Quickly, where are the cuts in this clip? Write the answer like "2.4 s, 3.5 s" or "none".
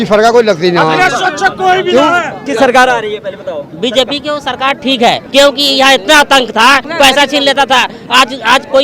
2.4 s, 5.2 s, 6.9 s